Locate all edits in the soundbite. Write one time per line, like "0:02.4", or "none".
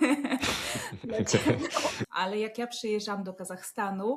0:02.0